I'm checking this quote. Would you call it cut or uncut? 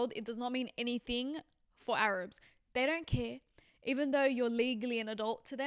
uncut